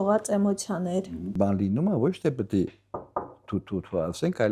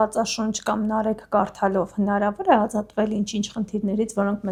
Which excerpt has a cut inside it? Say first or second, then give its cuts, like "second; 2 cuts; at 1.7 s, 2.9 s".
first; 1 cut; at 1.4 s